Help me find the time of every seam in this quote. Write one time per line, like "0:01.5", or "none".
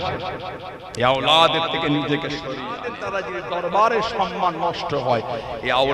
0:03.0